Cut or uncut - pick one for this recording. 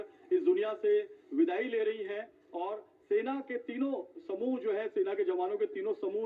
uncut